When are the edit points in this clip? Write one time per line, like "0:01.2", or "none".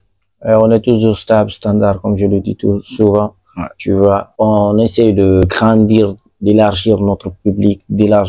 0:04.3
0:05.4